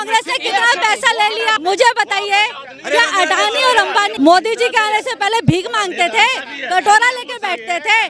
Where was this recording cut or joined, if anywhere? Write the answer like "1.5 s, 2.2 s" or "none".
1.6 s, 4.1 s

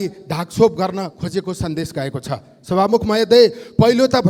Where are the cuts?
none

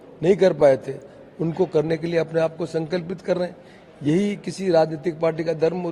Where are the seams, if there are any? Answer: none

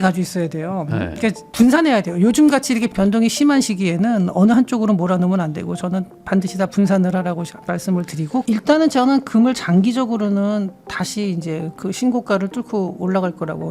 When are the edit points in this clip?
1.4 s, 8.4 s

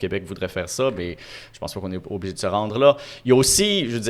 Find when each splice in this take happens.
none

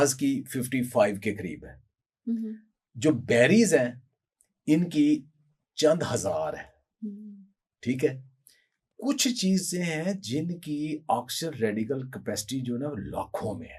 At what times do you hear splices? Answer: none

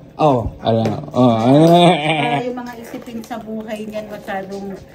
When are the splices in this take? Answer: none

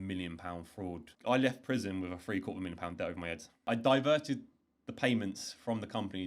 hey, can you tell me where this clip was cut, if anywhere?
1.1 s, 3.7 s

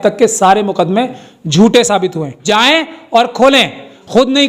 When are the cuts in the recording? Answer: 2.3 s

